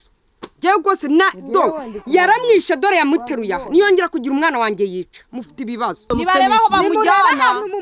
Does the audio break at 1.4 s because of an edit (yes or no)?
no